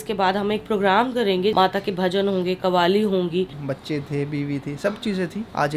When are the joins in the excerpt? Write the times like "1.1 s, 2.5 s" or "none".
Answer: 1.5 s, 3.5 s